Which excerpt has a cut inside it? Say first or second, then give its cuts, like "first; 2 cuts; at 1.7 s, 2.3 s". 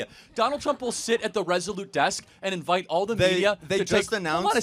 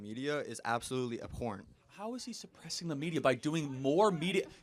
first; 1 cut; at 3.6 s